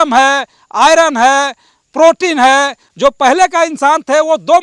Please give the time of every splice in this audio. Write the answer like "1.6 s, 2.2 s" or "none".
2.8 s